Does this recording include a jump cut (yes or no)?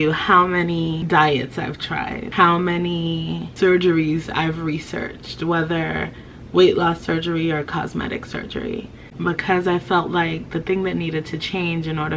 yes